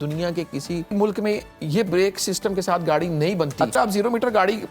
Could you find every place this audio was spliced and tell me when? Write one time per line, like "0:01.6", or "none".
0:00.9
0:03.7